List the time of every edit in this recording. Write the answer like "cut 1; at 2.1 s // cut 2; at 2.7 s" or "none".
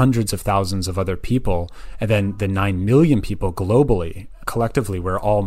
cut 1; at 4.4 s